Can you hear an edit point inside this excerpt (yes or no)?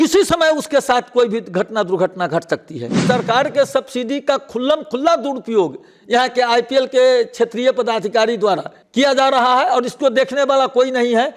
yes